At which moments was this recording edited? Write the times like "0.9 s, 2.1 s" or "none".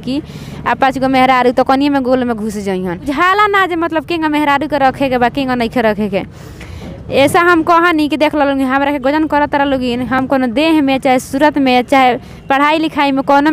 none